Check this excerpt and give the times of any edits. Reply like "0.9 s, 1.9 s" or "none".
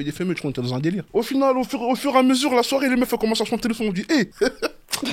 none